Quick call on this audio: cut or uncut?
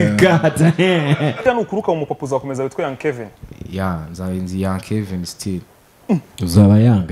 cut